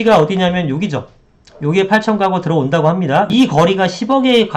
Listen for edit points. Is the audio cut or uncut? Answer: cut